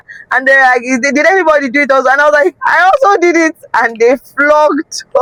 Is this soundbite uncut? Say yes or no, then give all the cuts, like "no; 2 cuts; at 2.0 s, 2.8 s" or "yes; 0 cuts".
yes; 0 cuts